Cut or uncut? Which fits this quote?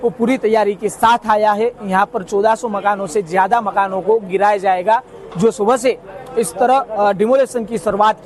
uncut